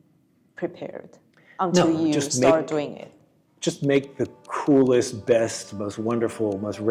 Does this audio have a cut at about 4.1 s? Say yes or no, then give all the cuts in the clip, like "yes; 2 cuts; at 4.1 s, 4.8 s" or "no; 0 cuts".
no; 0 cuts